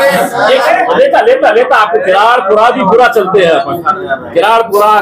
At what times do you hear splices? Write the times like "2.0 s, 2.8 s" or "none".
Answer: none